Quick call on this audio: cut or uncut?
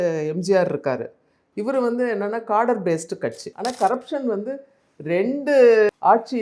cut